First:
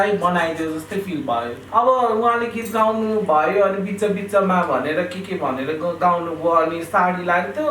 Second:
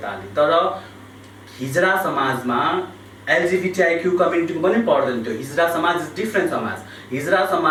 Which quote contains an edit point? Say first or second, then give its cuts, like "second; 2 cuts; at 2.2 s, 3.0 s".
first; 1 cut; at 1.6 s